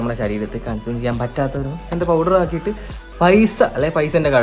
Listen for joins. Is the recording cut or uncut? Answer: uncut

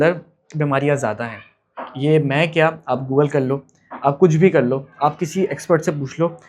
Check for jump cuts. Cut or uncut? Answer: uncut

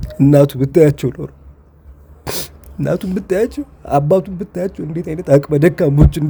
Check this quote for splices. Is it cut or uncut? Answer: uncut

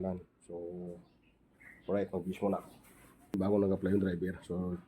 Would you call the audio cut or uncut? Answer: cut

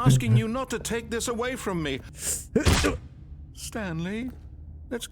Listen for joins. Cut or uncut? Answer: cut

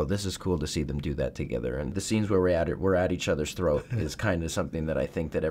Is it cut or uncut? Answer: cut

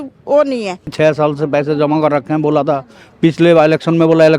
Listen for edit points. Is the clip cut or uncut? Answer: cut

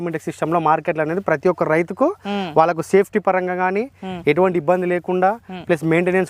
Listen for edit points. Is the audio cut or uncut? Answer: uncut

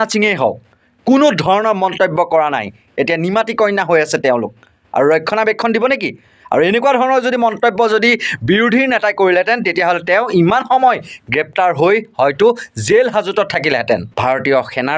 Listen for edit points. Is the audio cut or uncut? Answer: cut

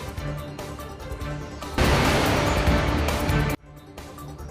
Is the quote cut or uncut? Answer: cut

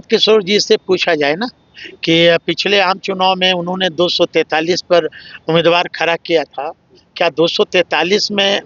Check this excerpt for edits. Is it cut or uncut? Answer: uncut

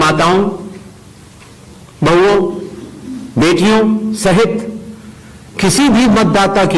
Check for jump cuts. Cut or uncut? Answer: uncut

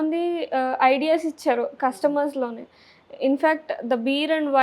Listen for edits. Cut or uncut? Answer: uncut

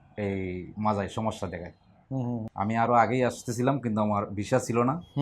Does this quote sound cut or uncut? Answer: cut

